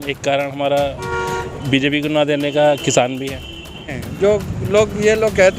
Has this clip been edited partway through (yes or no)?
yes